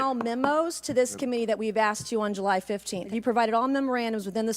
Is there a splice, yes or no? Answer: yes